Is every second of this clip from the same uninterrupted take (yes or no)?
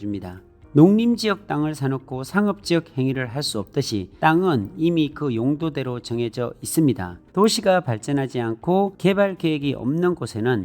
no